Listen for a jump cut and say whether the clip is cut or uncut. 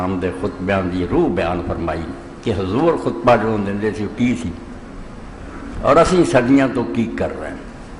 uncut